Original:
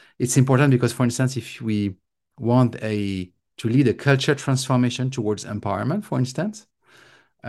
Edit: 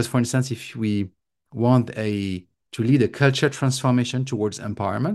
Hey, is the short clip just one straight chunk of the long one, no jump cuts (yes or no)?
yes